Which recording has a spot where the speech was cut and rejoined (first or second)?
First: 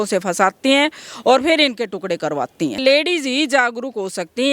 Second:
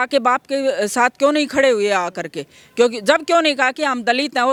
first